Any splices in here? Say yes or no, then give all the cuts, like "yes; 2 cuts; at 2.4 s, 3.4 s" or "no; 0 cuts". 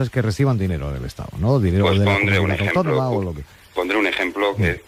no; 0 cuts